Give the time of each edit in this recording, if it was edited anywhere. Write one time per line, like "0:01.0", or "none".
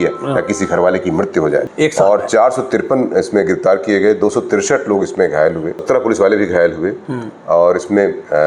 0:01.7
0:05.8